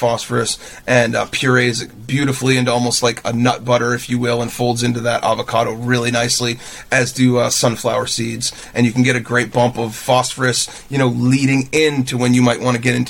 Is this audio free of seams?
yes; 0 cuts

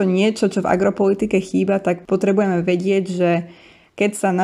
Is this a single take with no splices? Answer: yes; 0 cuts

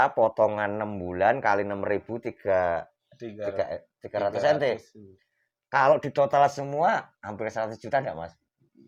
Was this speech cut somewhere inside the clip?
no; 0 cuts

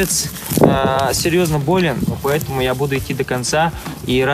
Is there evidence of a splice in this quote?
yes; 1 cut; at 2.2 s

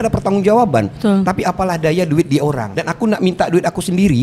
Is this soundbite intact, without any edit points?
no; 1 cut; at 2.7 s

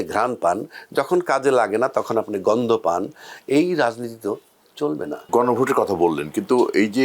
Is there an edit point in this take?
no; 0 cuts

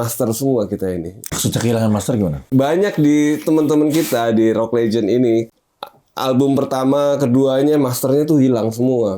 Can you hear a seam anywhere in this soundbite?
yes; 3 cuts; at 1.2 s, 2.4 s, 5.5 s

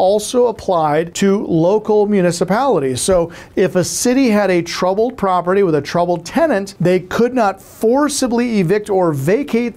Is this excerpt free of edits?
no; 2 cuts; at 1.1 s, 6.7 s

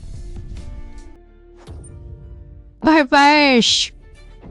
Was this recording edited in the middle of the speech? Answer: yes; 1 cut; at 1.2 s

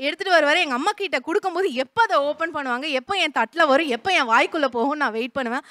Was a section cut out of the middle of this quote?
no; 0 cuts

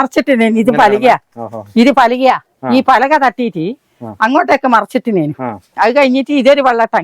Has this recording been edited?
yes; 1 cut; at 5.7 s

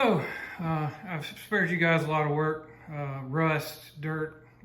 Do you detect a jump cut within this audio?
no; 0 cuts

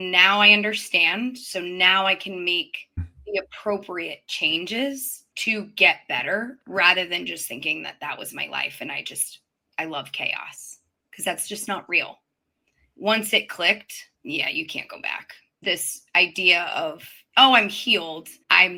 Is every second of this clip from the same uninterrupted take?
yes; 0 cuts

